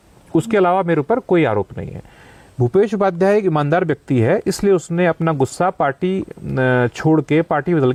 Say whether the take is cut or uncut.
uncut